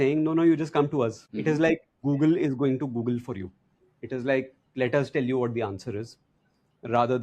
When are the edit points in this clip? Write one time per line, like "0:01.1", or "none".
0:01.3